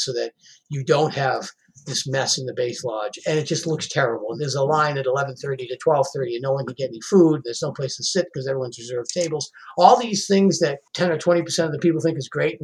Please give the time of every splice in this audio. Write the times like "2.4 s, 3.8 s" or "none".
3.2 s, 4.3 s, 10.8 s